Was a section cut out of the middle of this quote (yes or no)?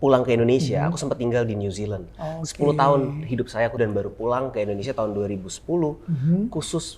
yes